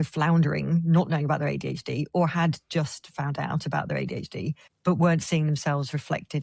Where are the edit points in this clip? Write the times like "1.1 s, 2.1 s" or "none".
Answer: none